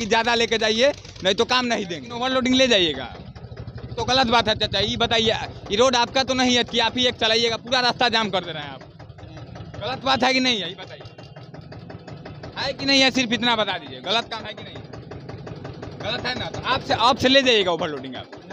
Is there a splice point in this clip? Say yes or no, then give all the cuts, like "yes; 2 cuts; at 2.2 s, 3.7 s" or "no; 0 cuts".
yes; 1 cut; at 2.0 s